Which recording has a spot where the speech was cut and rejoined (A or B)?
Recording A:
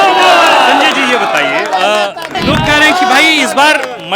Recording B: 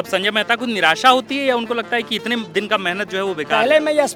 A